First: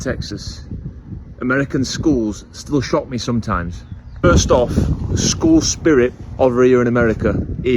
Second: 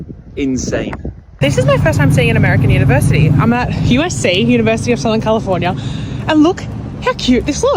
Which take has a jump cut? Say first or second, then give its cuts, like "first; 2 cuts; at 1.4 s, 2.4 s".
second; 1 cut; at 1.5 s